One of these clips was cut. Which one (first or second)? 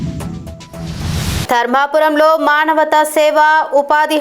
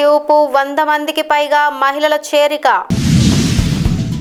first